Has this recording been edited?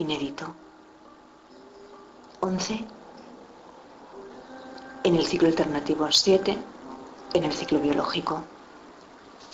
yes; 1 cut; at 6.2 s

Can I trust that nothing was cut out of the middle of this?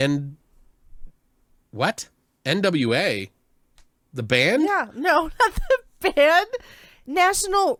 yes; 0 cuts

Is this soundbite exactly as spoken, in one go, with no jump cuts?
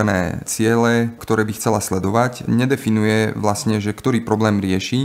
no; 1 cut; at 2.4 s

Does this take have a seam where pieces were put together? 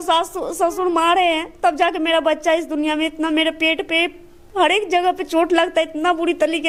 no; 0 cuts

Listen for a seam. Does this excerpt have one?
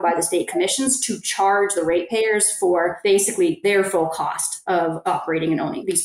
yes; 2 cuts; at 3.4 s, 4.8 s

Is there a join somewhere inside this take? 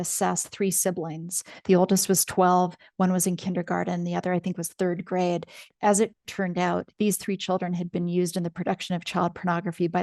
yes; 1 cut; at 5.6 s

